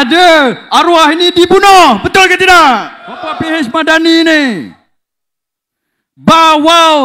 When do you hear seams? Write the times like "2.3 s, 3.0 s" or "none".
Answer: 3.3 s

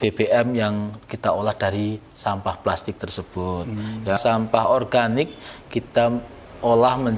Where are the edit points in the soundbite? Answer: 4.2 s

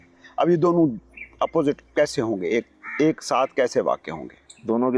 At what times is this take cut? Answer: none

